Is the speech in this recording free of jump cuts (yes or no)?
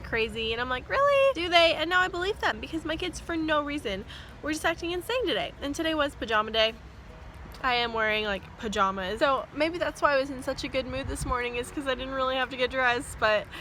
yes